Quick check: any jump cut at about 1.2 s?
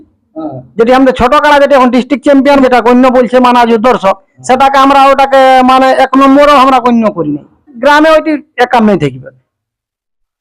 no; 2 cuts; at 2.6 s, 7.7 s

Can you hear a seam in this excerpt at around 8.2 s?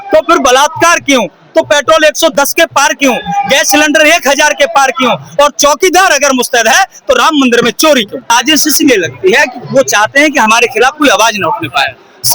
yes; 1 cut; at 8.2 s

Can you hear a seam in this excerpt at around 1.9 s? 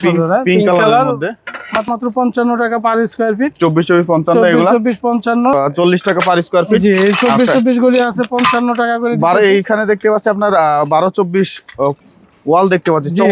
yes; 2 cuts; at 1.9 s, 5.5 s

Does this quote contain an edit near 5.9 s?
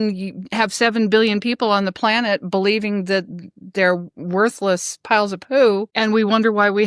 yes; 1 cut; at 5.9 s

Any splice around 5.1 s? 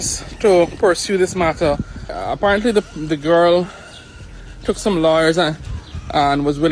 no; 1 cut; at 2.2 s

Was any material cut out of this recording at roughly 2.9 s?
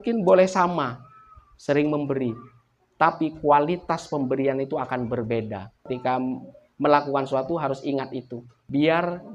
no; 1 cut; at 5.8 s

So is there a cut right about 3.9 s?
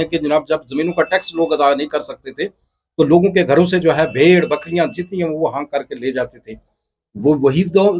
no; 0 cuts

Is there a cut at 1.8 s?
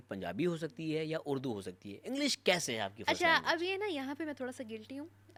no; 0 cuts

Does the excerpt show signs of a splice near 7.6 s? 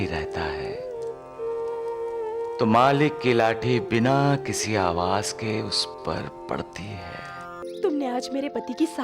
yes; 1 cut; at 7.6 s

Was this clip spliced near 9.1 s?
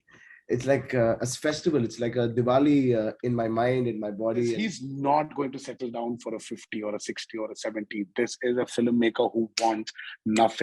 no; 1 cut; at 4.6 s

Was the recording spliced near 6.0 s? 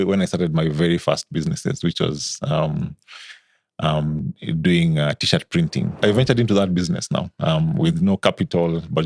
yes; 1 cut; at 6.0 s

